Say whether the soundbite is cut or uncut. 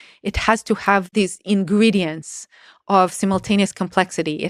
cut